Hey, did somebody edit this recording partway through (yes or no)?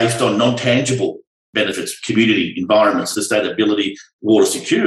yes